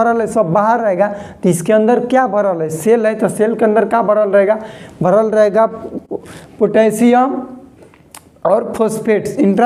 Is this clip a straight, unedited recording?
yes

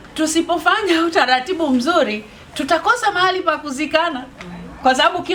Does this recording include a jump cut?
no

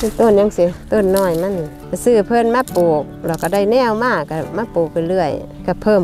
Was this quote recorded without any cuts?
yes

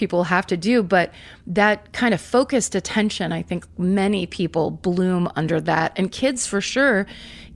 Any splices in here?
no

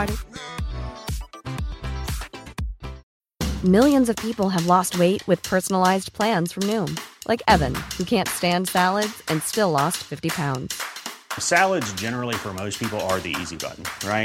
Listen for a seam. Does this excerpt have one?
no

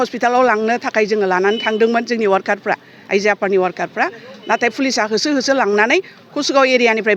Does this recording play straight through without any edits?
yes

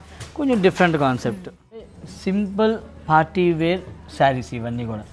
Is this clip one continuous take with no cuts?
no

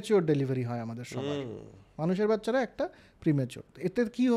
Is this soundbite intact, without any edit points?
yes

